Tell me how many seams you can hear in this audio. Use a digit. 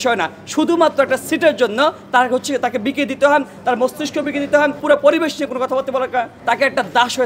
2